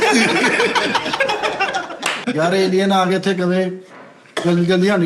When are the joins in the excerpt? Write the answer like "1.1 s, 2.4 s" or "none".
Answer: 2.2 s